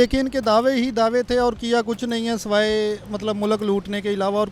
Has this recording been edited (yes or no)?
no